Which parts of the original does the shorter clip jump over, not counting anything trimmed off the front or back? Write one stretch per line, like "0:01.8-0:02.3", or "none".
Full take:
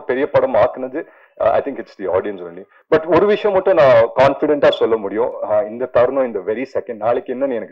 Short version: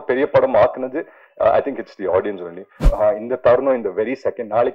0:02.8-0:05.3